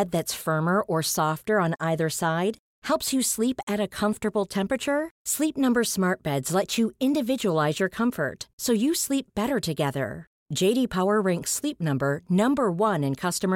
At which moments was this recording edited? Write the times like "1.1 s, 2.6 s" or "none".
none